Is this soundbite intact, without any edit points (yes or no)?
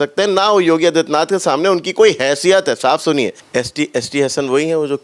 no